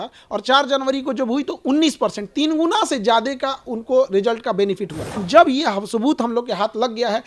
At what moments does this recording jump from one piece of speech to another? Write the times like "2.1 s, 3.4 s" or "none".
5.2 s

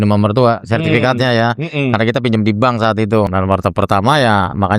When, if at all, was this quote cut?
3.3 s

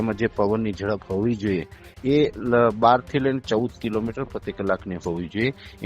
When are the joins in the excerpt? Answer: none

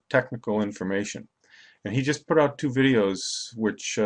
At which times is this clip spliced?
none

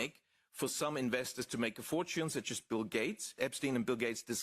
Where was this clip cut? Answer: 3.4 s

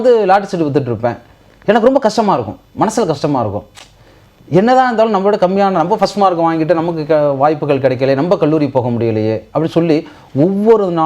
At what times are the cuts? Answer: none

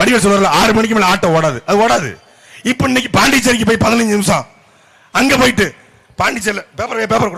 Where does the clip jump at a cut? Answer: none

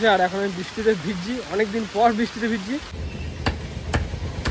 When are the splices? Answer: 3.0 s

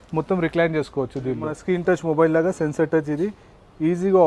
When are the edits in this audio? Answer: 1.5 s

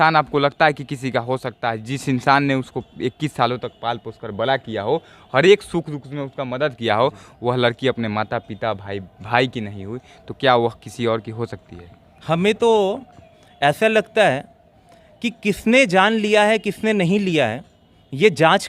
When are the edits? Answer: none

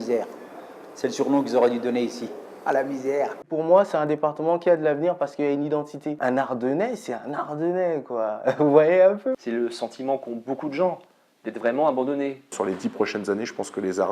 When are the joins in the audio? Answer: 3.4 s, 6.2 s, 9.4 s, 12.5 s

